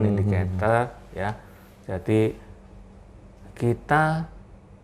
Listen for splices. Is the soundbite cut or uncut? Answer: uncut